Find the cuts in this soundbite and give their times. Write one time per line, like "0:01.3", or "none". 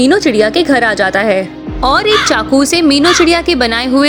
none